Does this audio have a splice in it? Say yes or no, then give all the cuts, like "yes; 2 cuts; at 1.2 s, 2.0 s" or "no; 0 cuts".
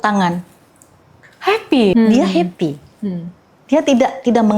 yes; 1 cut; at 1.9 s